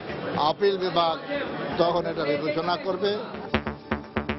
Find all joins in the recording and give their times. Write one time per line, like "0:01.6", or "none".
0:03.4